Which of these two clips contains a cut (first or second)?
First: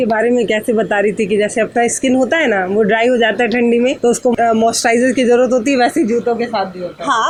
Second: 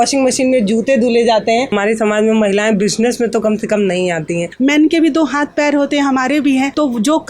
second